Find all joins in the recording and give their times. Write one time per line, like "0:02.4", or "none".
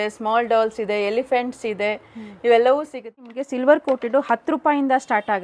0:03.4